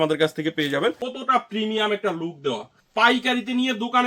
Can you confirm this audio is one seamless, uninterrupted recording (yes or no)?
no